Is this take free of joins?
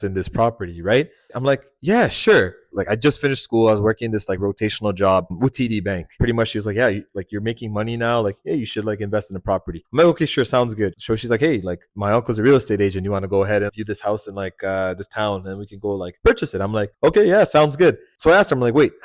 no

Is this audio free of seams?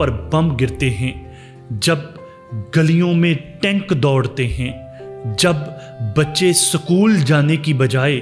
yes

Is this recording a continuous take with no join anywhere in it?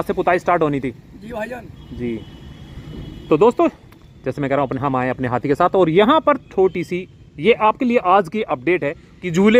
yes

